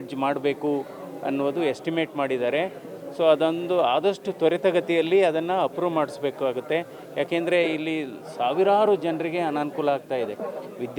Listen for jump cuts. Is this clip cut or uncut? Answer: uncut